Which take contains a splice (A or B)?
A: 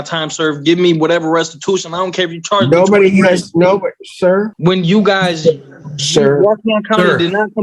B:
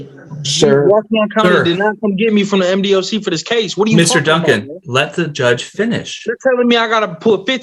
A